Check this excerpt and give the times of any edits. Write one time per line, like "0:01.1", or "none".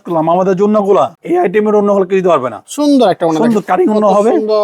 0:01.2